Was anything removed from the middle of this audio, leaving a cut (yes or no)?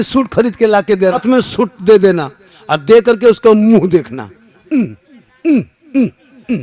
yes